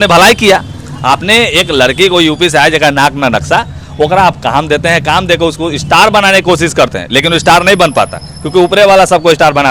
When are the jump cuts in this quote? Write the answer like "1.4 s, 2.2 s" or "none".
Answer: none